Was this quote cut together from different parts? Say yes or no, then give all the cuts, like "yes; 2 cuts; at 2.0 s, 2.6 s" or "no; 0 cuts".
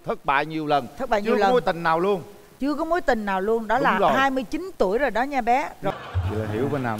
yes; 1 cut; at 5.9 s